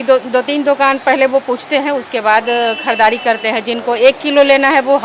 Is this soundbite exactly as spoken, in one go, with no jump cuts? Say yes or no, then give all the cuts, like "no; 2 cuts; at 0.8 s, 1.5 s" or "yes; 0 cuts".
yes; 0 cuts